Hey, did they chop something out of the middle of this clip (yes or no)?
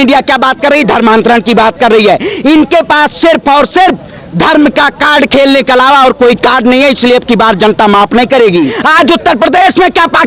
yes